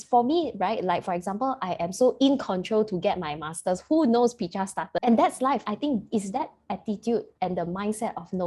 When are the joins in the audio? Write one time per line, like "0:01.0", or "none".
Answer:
0:04.9
0:05.6